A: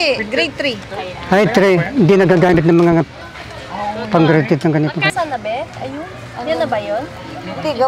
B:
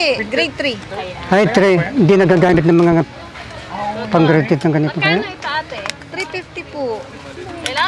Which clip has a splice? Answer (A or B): A